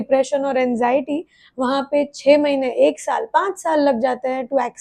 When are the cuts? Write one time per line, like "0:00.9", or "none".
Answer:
none